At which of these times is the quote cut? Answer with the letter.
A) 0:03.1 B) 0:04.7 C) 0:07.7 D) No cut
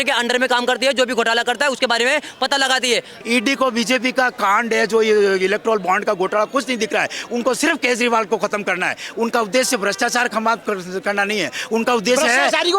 A